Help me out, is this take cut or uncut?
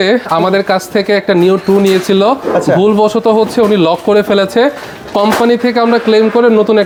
uncut